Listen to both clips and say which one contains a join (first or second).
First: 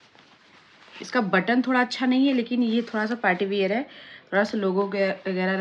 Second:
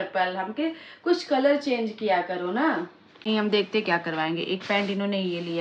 second